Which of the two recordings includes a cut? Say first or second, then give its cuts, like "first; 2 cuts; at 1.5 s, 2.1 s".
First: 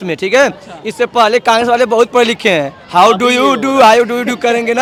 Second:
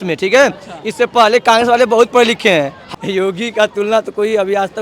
second; 1 cut; at 2.8 s